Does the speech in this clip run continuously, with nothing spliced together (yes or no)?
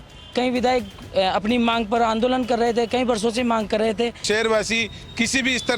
no